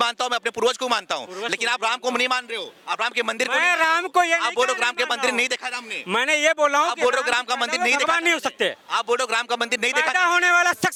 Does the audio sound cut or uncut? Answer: uncut